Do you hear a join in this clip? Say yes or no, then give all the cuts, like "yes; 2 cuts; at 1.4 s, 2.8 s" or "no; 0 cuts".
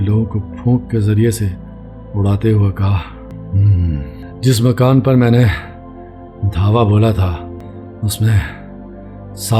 yes; 3 cuts; at 3.3 s, 4.2 s, 7.6 s